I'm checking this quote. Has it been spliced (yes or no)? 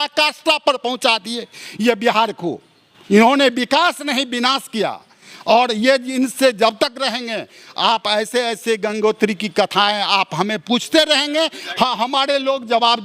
no